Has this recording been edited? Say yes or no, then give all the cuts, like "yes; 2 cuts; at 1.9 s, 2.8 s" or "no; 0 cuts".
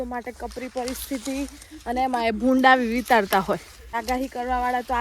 yes; 1 cut; at 4.0 s